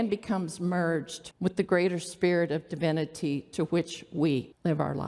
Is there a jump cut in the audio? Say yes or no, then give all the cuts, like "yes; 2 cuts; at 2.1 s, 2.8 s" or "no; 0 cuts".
yes; 1 cut; at 1.2 s